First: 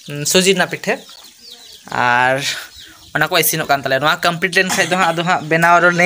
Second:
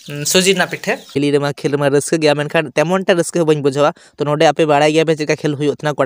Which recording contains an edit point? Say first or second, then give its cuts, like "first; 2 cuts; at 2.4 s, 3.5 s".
second; 1 cut; at 1.2 s